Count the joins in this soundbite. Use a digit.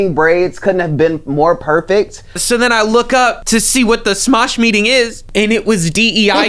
3